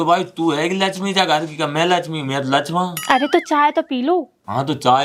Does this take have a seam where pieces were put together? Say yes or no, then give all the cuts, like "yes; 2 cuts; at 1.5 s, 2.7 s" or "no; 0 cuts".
no; 0 cuts